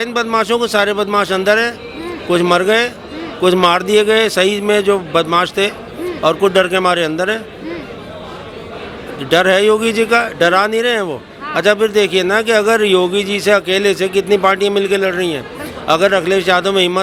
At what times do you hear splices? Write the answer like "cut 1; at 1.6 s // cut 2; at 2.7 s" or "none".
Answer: none